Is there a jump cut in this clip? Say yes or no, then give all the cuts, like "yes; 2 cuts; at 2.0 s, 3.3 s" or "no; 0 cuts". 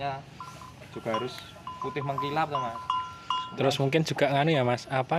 no; 0 cuts